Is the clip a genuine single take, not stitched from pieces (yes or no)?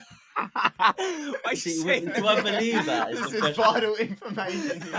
yes